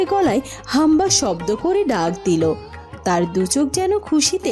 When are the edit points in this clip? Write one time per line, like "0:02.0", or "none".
none